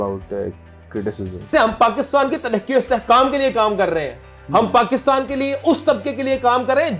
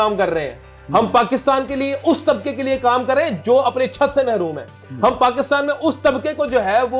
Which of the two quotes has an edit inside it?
first; 1 cut; at 1.5 s

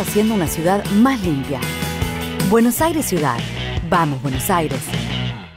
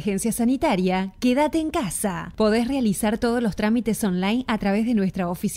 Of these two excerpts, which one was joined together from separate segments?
first; 1 cut; at 1.6 s

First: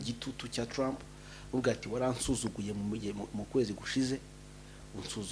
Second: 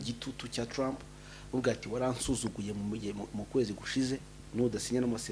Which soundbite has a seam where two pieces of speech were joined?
second; 1 cut; at 4.4 s

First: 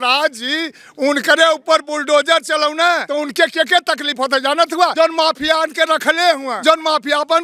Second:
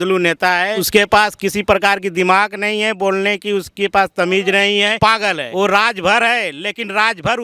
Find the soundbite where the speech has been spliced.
first; 3 cuts; at 3.0 s, 4.9 s, 6.5 s

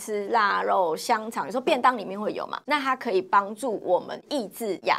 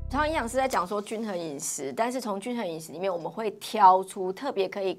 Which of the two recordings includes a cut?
first; 1 cut; at 2.5 s

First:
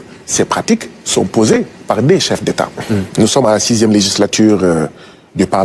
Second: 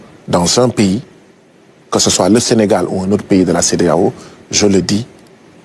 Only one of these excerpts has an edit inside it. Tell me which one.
first; 1 cut; at 3.1 s

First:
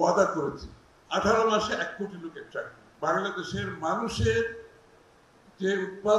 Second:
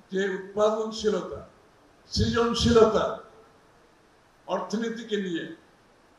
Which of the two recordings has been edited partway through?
first; 1 cut; at 2.8 s

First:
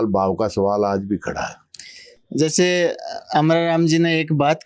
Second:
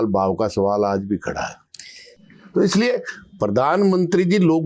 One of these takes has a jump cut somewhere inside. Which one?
second; 1 cut; at 2.1 s

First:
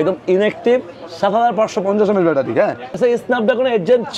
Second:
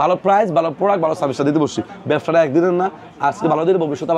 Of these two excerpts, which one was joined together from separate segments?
first; 1 cut; at 3.0 s

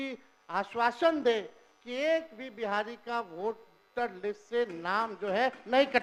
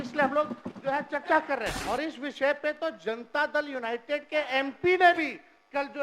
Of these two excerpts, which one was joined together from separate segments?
second; 1 cut; at 1.7 s

